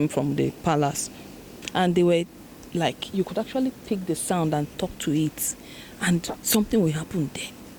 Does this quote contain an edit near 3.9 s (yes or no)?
no